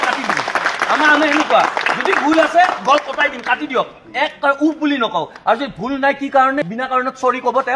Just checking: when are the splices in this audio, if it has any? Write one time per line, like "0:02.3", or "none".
none